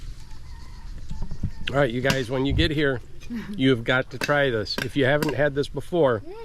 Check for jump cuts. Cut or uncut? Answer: uncut